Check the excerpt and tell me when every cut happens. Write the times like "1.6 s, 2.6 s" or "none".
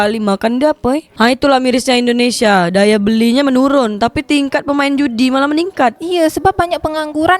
1.1 s, 6.0 s